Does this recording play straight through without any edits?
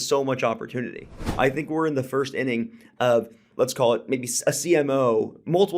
no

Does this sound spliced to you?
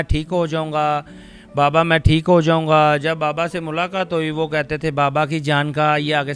no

